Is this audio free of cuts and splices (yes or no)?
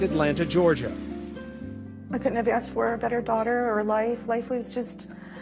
yes